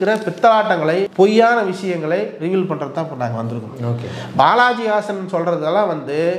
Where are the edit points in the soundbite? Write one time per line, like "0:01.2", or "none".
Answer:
0:01.1